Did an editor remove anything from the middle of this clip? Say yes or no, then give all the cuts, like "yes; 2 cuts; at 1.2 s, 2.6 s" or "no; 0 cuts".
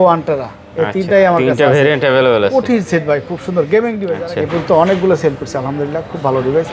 yes; 1 cut; at 4.1 s